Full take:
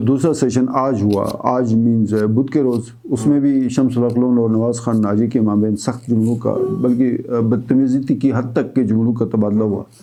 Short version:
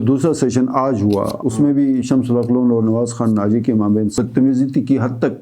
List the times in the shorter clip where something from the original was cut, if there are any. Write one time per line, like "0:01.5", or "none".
0:01.3
0:04.2